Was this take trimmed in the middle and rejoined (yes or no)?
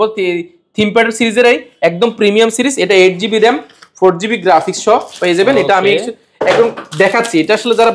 no